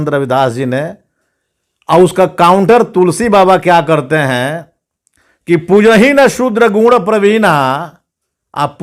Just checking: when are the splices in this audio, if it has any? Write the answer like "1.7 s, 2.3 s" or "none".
none